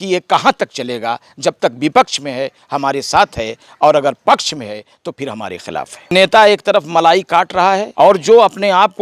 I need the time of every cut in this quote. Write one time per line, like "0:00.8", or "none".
0:06.1
0:07.9